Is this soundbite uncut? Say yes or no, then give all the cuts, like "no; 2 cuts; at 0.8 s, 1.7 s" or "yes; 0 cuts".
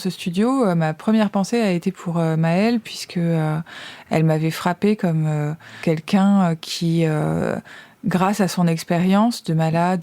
no; 2 cuts; at 3.9 s, 5.8 s